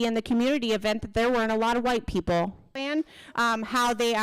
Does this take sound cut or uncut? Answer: cut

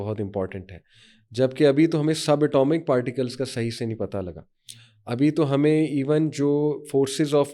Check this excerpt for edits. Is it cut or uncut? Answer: uncut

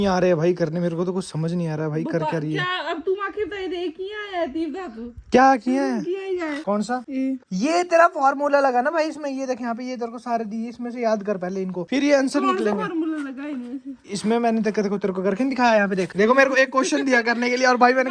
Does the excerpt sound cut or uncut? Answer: uncut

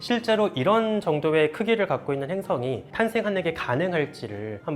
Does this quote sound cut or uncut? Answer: cut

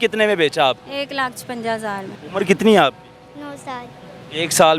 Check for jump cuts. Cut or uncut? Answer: cut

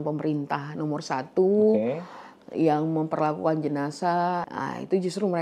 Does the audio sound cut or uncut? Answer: cut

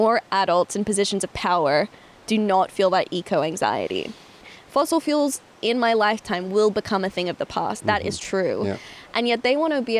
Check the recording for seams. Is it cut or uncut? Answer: cut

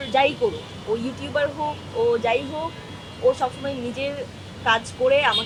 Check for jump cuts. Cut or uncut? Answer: uncut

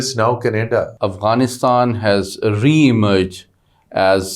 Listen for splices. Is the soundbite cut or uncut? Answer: cut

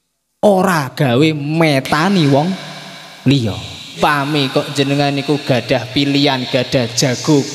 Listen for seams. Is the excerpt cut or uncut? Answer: cut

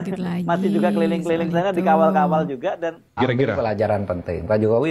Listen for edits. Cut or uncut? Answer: cut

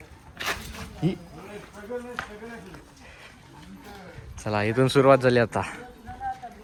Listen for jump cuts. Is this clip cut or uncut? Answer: uncut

